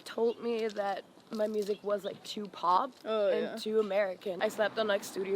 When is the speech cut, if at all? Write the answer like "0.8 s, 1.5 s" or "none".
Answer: 4.4 s